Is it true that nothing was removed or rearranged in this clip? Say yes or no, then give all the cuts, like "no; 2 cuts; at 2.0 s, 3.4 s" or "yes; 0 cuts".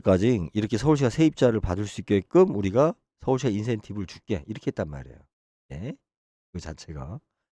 yes; 0 cuts